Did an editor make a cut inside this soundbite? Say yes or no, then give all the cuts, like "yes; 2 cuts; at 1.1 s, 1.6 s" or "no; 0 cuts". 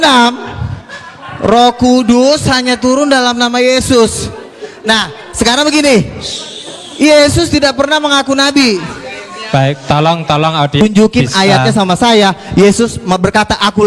yes; 1 cut; at 10.8 s